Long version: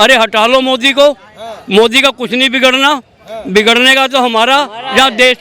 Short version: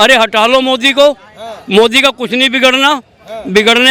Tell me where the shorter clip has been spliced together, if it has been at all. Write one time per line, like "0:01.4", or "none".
none